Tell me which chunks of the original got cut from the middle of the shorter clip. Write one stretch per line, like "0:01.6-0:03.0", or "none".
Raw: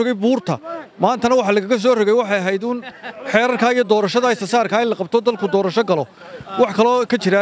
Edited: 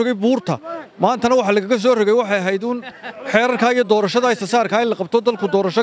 none